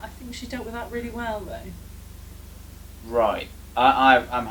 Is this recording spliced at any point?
no; 0 cuts

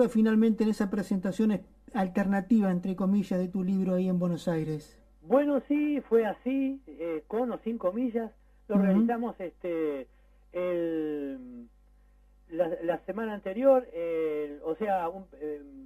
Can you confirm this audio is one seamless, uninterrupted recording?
no; 1 cut; at 13.1 s

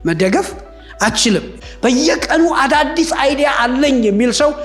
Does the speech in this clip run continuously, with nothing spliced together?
no; 1 cut; at 1.6 s

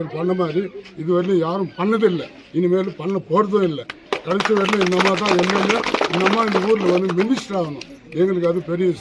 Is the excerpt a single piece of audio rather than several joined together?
yes; 0 cuts

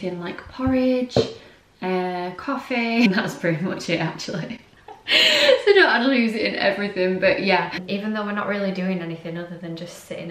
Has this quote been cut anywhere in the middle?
yes; 2 cuts; at 3.1 s, 7.8 s

